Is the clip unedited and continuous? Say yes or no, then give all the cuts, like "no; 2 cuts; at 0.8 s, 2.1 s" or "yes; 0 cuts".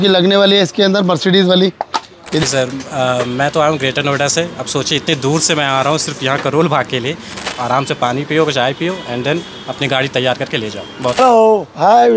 no; 3 cuts; at 2.4 s, 7.4 s, 11.2 s